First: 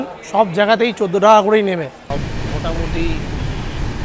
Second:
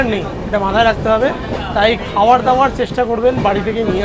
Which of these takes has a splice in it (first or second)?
first